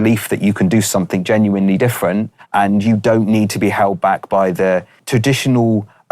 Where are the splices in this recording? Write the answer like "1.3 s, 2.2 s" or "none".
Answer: 2.4 s, 5.0 s